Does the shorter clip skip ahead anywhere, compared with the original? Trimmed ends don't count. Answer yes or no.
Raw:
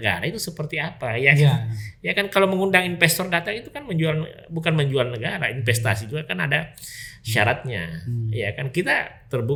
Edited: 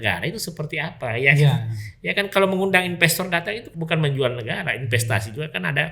yes